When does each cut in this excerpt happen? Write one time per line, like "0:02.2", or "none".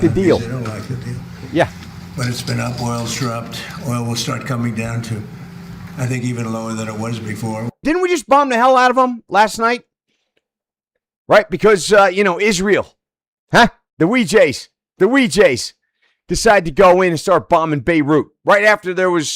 0:07.8